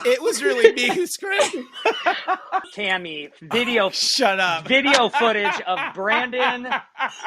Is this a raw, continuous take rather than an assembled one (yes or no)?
no